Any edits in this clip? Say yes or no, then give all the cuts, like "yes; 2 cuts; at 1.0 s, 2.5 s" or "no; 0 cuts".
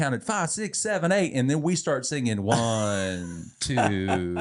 no; 0 cuts